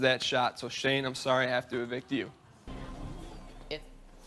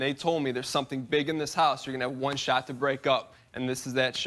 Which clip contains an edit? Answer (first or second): first